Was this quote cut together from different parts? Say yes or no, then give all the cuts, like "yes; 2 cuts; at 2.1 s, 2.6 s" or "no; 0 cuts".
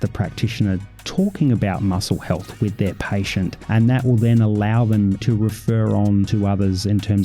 yes; 3 cuts; at 3.6 s, 5.2 s, 6.3 s